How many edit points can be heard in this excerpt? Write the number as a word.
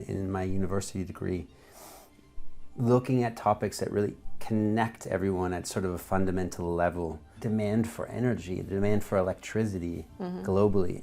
one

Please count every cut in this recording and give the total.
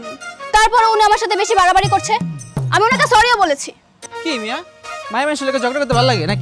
one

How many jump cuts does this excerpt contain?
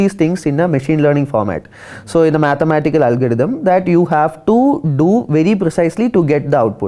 zero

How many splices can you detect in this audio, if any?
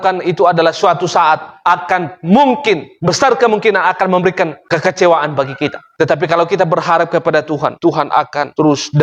zero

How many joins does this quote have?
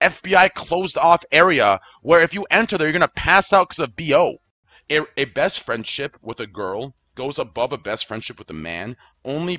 one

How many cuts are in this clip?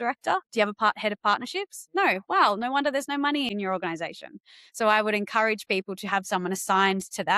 one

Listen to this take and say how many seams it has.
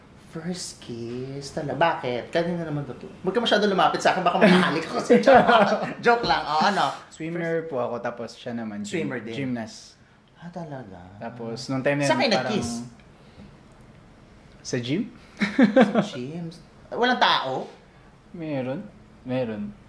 one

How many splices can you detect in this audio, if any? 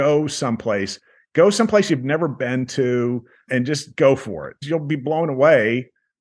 zero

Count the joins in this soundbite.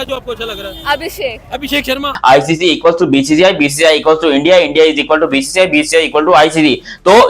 one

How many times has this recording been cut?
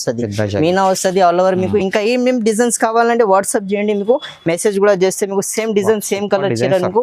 zero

